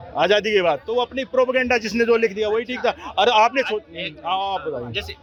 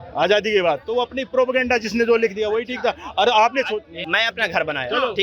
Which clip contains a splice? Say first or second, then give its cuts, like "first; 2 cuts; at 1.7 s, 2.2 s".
second; 1 cut; at 4.0 s